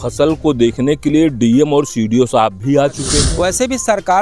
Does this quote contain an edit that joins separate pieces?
yes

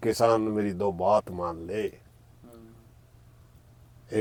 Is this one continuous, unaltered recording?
yes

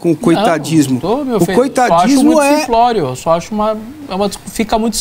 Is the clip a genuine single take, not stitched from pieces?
yes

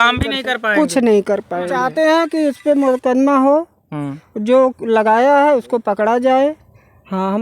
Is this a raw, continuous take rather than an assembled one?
no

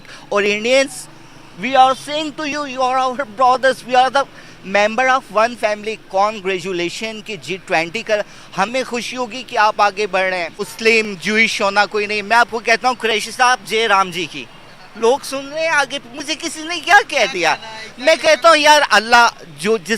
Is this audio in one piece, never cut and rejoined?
no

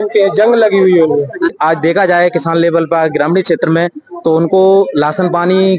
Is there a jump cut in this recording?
yes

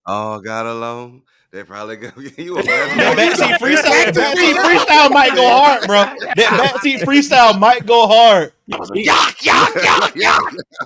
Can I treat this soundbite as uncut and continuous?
no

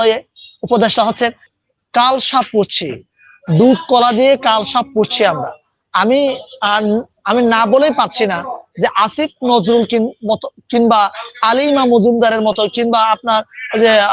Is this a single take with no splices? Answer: no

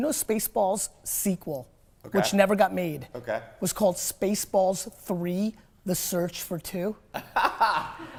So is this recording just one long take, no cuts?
yes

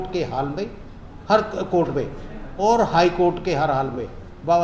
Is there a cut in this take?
no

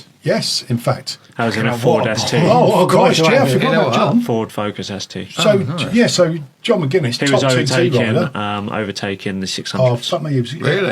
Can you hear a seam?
no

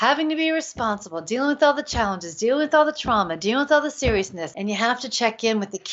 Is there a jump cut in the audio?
yes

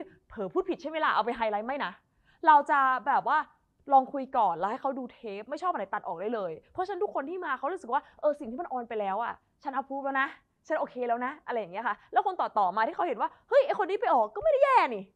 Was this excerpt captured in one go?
yes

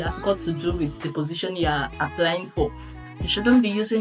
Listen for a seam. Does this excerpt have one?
yes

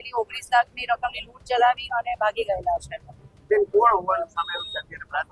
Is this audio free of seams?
yes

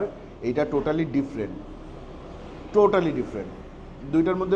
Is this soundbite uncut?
yes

